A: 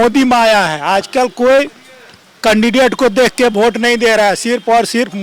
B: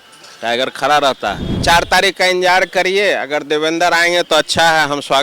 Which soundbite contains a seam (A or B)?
B